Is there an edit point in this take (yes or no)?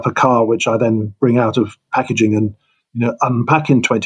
no